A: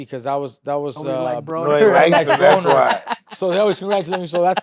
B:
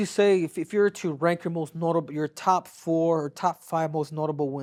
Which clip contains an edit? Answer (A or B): A